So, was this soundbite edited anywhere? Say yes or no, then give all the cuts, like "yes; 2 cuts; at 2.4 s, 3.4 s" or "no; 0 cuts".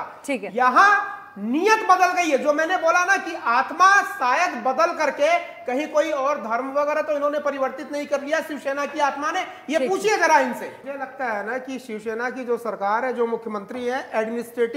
yes; 1 cut; at 10.7 s